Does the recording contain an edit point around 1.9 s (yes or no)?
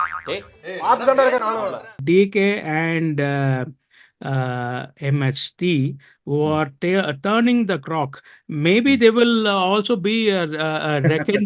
yes